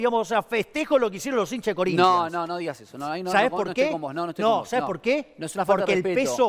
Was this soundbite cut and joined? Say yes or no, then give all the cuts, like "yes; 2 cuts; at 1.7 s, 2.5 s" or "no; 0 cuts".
no; 0 cuts